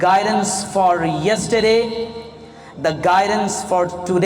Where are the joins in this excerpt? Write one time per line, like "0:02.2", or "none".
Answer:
none